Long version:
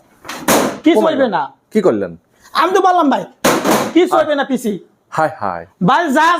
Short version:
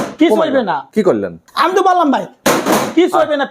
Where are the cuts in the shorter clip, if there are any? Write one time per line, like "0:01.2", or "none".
0:01.1